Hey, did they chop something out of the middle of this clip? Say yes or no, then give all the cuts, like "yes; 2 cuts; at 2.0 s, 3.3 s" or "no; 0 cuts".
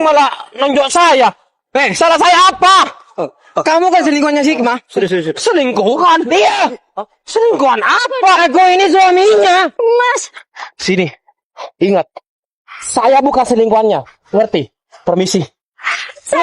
yes; 1 cut; at 9.8 s